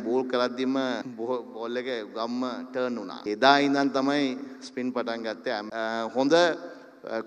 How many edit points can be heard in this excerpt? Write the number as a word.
three